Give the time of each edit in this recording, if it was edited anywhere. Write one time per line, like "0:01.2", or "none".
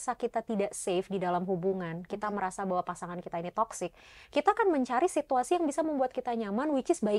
none